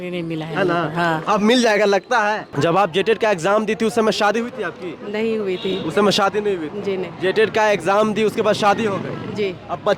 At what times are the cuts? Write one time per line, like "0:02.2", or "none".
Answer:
0:02.5

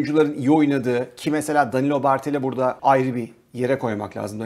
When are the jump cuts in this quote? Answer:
0:02.8

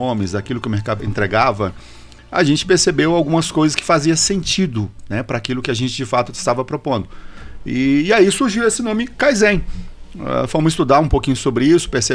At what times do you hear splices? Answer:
0:01.0

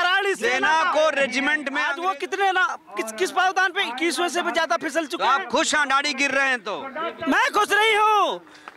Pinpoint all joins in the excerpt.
0:01.8

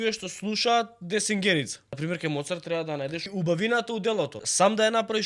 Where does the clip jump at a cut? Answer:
0:01.8
0:03.3
0:04.4

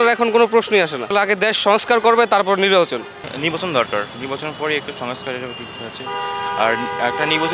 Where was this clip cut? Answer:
none

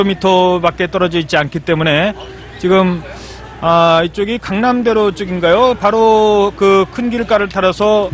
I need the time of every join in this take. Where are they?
none

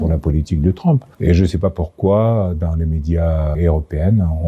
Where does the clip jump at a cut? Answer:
0:01.1
0:03.6

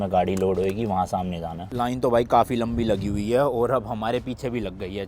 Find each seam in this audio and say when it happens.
0:01.7

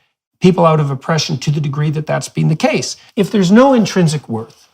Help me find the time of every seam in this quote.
0:03.0

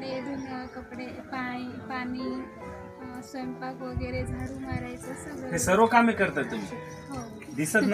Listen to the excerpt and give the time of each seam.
none

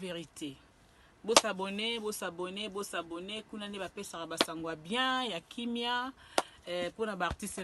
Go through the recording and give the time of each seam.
none

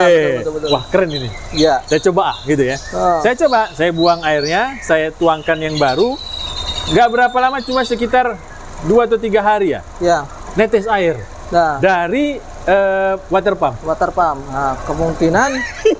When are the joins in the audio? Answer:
none

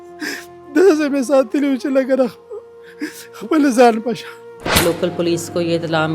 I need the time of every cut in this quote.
0:04.7

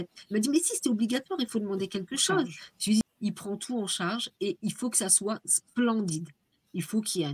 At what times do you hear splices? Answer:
0:03.1

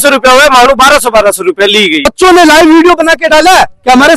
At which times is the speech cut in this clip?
0:02.0

